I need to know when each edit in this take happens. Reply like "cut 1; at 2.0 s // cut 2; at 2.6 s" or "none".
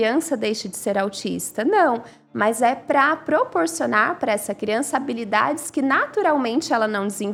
none